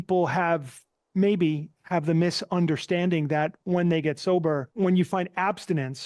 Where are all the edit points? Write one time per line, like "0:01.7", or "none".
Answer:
0:04.7